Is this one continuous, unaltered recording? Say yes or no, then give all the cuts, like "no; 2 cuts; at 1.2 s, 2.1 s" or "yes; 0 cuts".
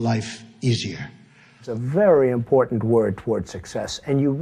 no; 1 cut; at 1.8 s